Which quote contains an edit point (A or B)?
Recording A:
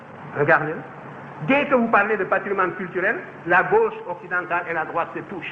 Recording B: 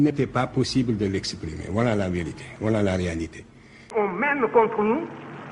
B